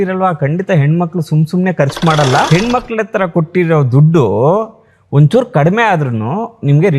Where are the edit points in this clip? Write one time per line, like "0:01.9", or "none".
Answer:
0:02.5